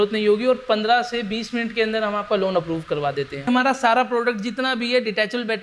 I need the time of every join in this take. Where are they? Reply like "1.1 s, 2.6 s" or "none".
3.5 s